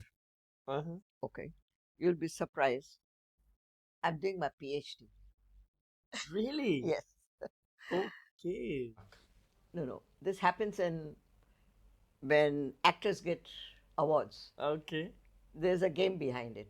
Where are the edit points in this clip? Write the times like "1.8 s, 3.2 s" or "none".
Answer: 9.0 s